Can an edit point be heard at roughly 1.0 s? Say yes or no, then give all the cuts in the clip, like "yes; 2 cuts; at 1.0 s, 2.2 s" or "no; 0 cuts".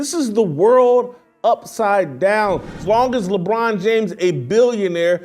no; 1 cut; at 2.7 s